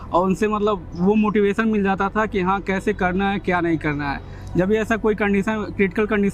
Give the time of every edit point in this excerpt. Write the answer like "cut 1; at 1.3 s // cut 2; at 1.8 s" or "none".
none